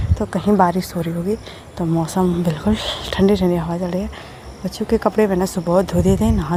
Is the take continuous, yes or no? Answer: yes